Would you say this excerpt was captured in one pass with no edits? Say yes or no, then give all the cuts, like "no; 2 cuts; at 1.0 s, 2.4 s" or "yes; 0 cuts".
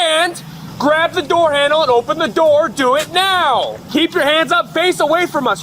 no; 1 cut; at 3.8 s